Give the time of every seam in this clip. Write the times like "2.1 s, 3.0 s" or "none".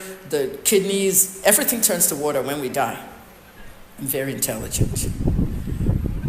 4.7 s